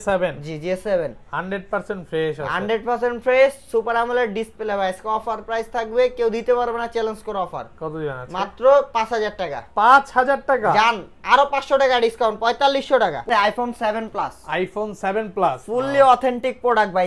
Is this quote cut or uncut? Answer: cut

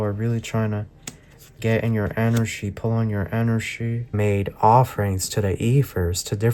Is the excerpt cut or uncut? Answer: cut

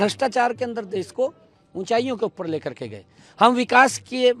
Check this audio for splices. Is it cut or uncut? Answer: uncut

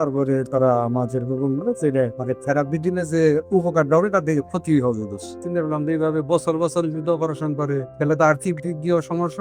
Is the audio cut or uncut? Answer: cut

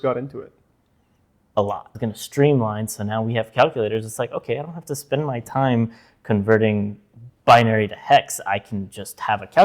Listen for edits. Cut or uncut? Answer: cut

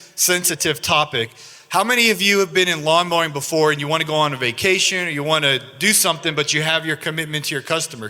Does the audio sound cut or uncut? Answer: uncut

